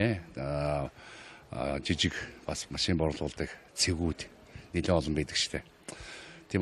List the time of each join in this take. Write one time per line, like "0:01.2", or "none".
0:03.8